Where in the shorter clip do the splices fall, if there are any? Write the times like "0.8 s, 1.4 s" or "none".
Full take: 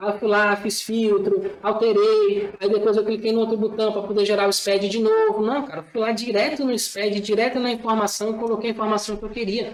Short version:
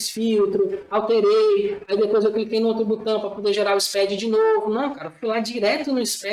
none